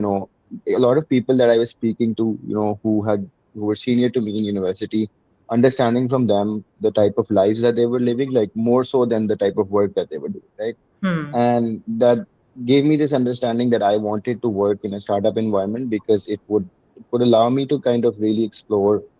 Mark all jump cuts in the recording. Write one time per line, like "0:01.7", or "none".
none